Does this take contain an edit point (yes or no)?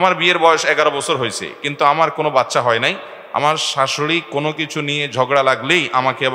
no